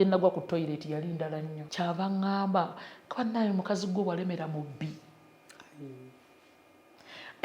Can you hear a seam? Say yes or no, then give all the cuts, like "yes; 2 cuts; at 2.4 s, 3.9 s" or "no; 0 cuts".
yes; 1 cut; at 1.6 s